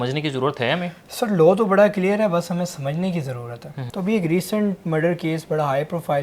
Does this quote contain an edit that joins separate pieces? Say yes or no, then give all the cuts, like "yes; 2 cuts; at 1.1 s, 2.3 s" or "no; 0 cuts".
yes; 1 cut; at 3.8 s